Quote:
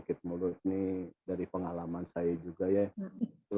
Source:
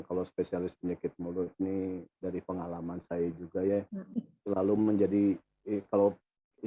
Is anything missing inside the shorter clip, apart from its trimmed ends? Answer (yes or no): no